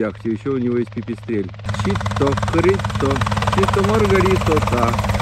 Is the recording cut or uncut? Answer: cut